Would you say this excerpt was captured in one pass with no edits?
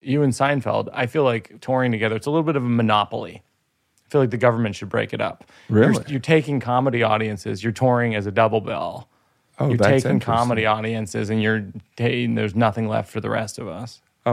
no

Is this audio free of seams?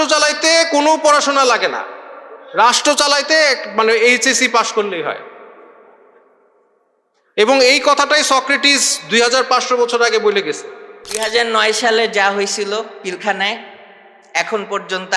no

